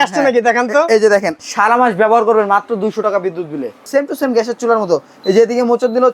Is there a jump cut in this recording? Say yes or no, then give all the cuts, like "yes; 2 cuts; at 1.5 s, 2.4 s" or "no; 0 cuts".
yes; 2 cuts; at 1.4 s, 3.9 s